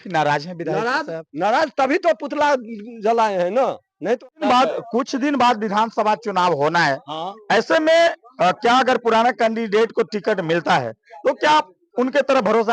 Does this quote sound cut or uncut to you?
cut